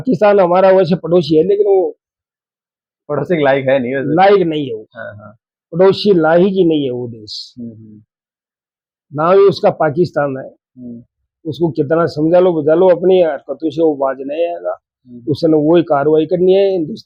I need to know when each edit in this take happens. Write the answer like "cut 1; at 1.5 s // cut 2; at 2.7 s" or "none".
none